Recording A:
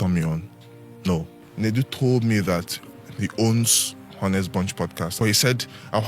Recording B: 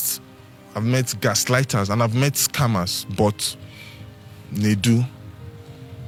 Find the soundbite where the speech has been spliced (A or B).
A